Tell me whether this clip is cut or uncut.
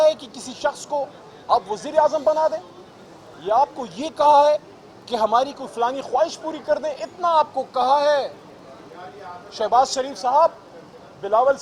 uncut